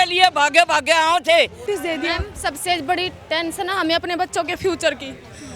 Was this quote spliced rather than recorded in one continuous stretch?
yes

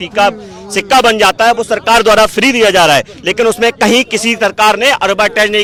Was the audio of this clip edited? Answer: no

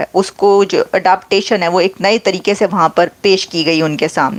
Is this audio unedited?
yes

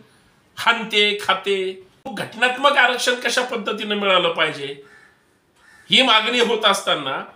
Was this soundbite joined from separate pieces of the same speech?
yes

